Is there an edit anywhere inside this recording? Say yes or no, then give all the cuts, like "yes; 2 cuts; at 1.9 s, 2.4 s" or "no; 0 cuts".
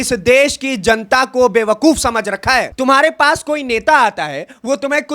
yes; 1 cut; at 2.7 s